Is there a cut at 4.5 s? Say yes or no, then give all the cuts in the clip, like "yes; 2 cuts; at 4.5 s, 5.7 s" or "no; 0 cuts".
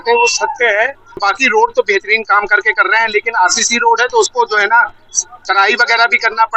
no; 1 cut; at 1.2 s